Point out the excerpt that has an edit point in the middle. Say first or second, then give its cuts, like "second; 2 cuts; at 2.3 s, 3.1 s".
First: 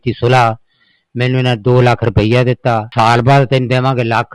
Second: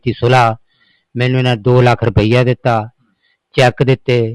first; 1 cut; at 2.9 s